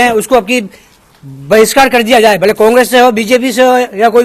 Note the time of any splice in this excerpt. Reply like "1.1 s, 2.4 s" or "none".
none

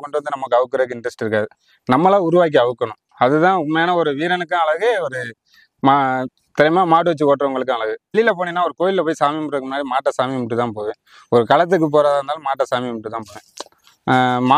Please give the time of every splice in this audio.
8.2 s

